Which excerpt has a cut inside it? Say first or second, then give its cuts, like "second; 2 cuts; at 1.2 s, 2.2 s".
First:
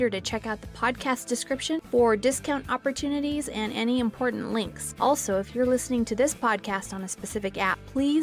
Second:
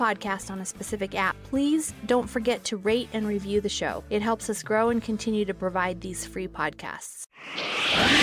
second; 1 cut; at 7.2 s